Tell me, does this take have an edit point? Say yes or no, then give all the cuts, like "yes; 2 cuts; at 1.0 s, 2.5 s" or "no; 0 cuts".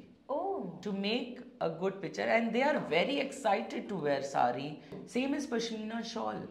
yes; 1 cut; at 4.9 s